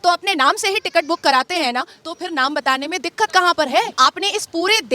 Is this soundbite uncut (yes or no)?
no